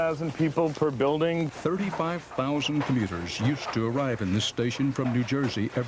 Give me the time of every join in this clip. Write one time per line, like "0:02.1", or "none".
0:01.5

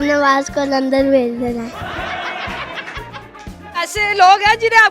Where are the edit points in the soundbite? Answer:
0:03.6

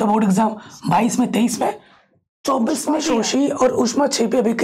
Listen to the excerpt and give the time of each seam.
0:03.0

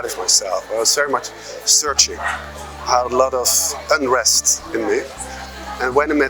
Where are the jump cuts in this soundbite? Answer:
none

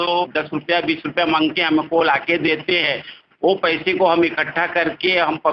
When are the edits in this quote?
none

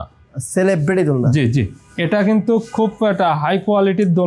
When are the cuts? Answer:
none

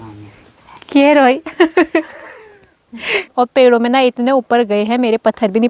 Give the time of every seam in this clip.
0:03.2

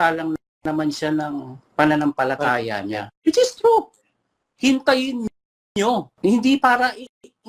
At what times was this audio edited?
0:06.1

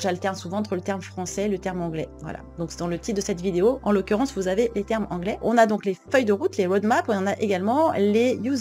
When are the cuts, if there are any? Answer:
0:03.8
0:05.4

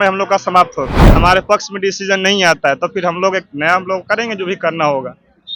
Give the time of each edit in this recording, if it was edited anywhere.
0:01.0

